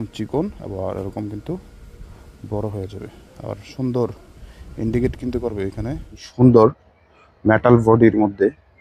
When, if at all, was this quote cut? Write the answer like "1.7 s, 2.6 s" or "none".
6.2 s